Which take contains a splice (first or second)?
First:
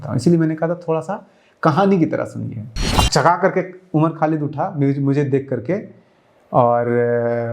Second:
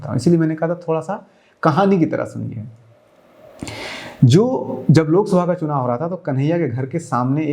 first